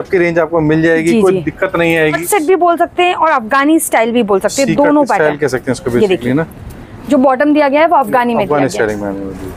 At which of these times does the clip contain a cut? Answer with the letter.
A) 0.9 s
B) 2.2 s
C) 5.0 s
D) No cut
B